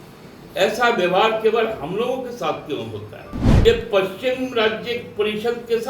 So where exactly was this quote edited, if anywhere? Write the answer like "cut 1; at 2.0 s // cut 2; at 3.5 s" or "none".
cut 1; at 3.4 s